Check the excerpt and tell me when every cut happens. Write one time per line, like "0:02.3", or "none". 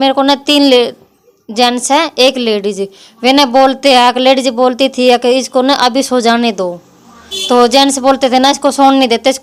none